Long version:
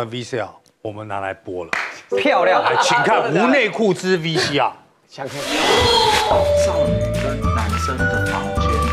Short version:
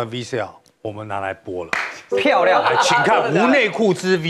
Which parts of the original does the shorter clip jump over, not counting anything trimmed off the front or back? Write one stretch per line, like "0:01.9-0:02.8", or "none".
none